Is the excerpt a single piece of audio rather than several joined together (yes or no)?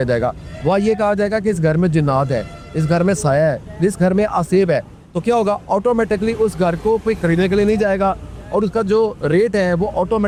yes